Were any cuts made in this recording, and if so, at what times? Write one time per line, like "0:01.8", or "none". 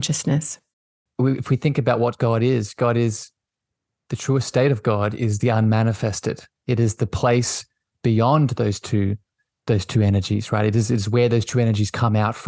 0:01.0